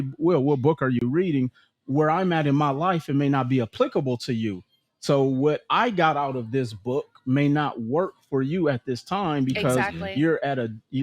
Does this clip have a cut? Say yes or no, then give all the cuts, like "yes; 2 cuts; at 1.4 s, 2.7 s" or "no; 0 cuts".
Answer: no; 0 cuts